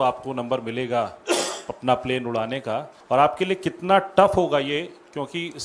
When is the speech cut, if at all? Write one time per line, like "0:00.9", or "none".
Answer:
0:02.9